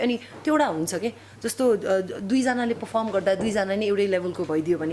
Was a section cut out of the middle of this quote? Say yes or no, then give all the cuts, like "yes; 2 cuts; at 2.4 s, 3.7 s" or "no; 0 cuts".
no; 0 cuts